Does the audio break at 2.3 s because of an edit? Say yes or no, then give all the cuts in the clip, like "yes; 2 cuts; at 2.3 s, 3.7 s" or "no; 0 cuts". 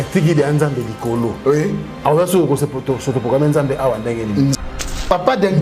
no; 1 cut; at 4.6 s